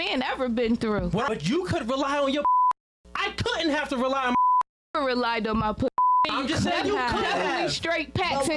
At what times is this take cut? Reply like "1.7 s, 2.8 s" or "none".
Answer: 1.3 s